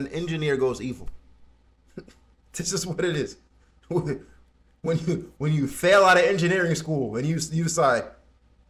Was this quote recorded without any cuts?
yes; 0 cuts

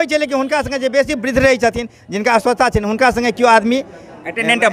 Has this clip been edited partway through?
no; 0 cuts

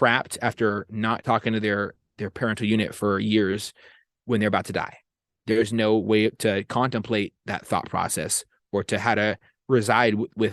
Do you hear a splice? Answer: yes; 1 cut; at 1.2 s

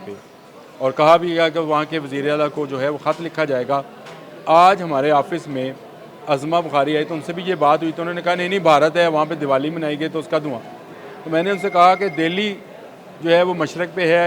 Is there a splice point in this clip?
no; 0 cuts

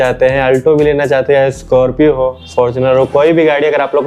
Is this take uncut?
yes; 0 cuts

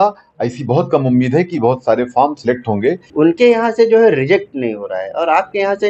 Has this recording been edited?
yes; 1 cut; at 3.0 s

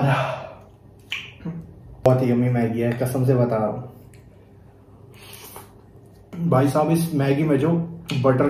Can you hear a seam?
yes; 2 cuts; at 2.1 s, 6.3 s

